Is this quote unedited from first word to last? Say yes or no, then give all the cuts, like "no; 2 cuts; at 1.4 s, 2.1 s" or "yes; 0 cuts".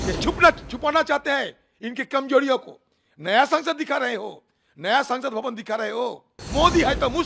no; 1 cut; at 6.3 s